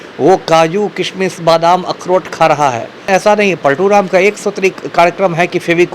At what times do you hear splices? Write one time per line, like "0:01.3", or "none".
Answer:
0:03.1